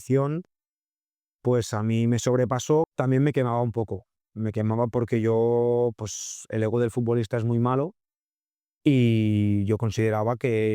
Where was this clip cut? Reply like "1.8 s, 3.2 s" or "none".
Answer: 2.9 s